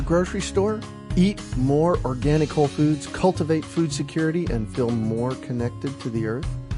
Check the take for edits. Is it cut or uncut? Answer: uncut